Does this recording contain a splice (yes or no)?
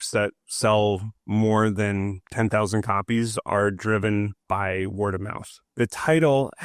no